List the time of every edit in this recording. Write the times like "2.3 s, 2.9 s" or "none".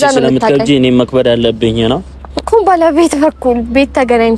none